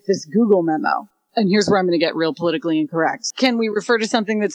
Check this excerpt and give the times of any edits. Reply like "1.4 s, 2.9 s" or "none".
1.1 s, 3.3 s